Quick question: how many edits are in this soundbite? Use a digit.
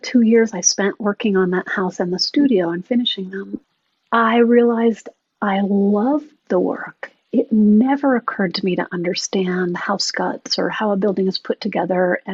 1